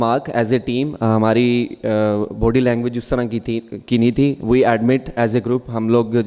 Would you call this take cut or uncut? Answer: uncut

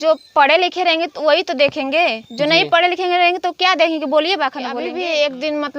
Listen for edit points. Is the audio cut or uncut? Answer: cut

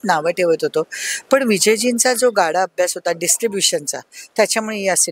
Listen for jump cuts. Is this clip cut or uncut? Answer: uncut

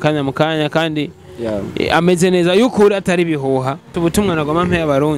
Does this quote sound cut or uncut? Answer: cut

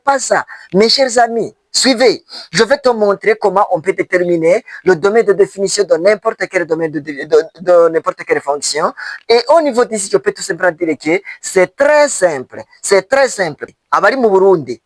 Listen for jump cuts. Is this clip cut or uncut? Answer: cut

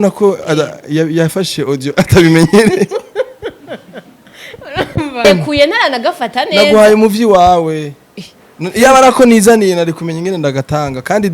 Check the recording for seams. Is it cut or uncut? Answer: cut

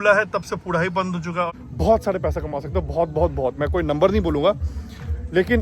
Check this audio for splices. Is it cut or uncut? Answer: cut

